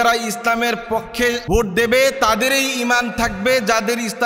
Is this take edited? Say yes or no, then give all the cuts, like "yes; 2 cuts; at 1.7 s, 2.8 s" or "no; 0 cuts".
yes; 1 cut; at 1.4 s